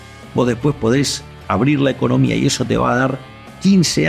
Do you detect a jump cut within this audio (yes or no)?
no